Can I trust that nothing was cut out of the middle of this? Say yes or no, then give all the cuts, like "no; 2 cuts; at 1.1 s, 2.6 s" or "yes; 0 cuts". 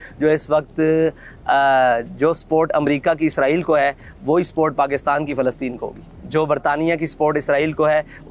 yes; 0 cuts